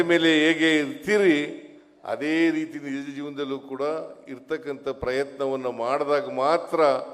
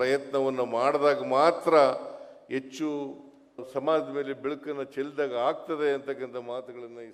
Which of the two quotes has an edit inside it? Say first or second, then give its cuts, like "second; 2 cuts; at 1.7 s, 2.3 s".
second; 1 cut; at 3.6 s